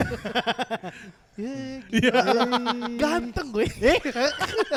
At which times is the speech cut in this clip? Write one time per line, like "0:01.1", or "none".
none